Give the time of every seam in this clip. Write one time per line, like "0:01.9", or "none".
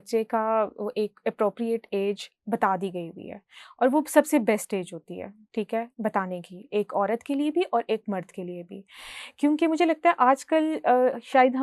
none